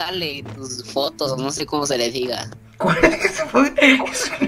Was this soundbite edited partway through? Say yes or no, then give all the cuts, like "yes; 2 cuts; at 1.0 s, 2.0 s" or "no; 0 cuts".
no; 0 cuts